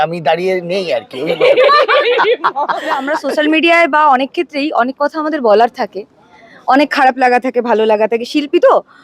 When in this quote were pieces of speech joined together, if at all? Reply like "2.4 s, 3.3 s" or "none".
3.1 s